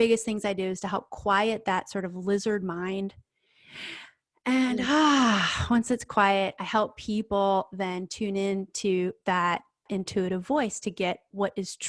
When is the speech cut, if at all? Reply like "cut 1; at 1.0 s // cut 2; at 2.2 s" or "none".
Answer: none